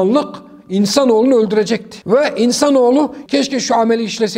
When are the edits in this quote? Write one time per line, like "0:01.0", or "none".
0:01.9
0:03.2